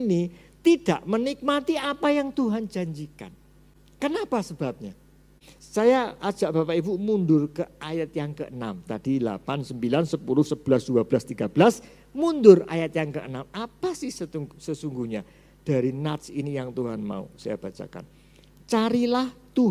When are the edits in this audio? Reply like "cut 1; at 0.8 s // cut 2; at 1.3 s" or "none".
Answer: none